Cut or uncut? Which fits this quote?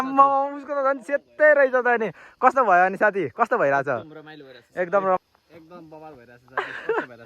cut